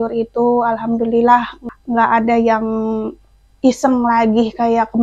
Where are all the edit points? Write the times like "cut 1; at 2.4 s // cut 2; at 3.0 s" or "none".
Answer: cut 1; at 1.6 s